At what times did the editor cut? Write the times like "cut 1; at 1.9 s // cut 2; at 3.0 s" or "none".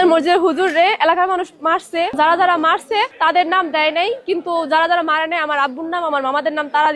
cut 1; at 2.1 s // cut 2; at 3.1 s